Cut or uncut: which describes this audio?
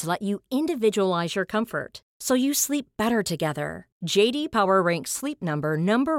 uncut